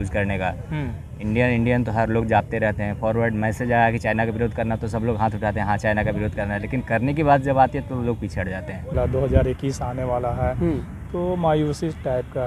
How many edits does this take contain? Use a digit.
1